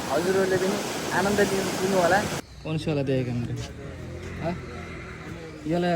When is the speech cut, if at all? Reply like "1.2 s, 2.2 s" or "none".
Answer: 2.4 s